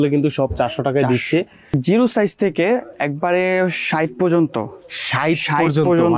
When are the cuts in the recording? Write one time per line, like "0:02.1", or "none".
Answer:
0:01.8